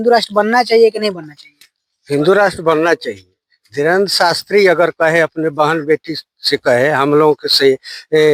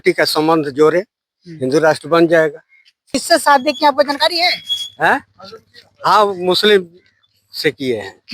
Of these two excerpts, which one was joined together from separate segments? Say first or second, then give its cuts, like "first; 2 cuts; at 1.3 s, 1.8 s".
second; 1 cut; at 3.1 s